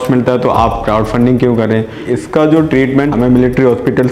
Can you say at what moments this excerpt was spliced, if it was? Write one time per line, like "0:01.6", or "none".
0:02.0
0:03.1